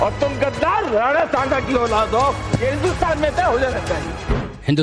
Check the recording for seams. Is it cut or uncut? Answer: cut